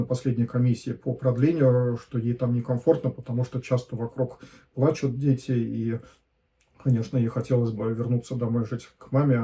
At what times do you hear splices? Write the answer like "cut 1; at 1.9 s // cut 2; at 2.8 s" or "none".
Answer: none

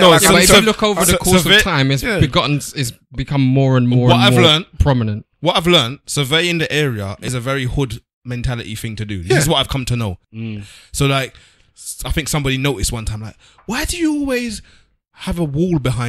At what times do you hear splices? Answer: cut 1; at 7.2 s // cut 2; at 10.2 s

